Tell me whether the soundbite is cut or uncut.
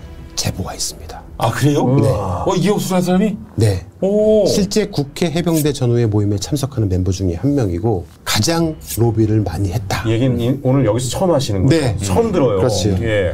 uncut